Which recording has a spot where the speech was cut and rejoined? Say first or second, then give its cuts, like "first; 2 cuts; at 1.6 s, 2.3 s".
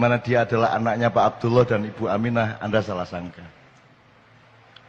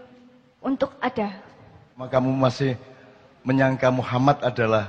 second; 1 cut; at 2.1 s